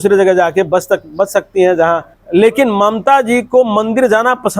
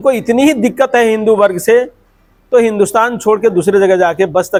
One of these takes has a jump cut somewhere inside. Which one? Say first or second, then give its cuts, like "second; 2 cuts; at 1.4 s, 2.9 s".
first; 1 cut; at 2.1 s